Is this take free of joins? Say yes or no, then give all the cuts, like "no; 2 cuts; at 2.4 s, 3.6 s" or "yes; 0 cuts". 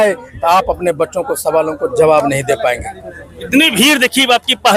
yes; 0 cuts